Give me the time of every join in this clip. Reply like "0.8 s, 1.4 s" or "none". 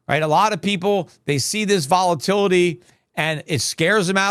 none